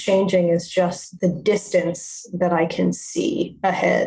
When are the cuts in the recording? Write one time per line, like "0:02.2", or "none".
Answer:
0:01.0